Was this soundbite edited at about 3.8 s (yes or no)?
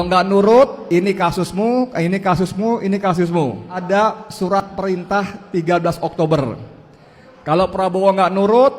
yes